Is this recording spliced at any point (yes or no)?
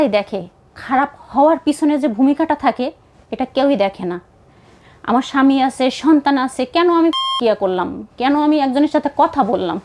no